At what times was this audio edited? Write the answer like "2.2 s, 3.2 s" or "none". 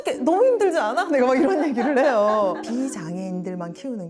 2.6 s